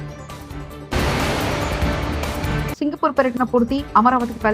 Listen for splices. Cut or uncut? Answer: cut